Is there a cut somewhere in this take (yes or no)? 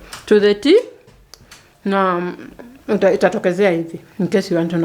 no